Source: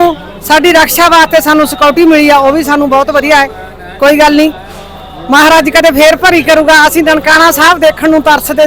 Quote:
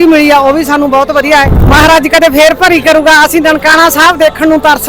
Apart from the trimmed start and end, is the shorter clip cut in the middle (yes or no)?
yes